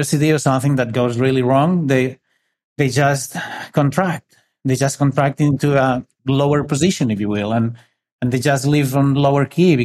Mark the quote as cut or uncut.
cut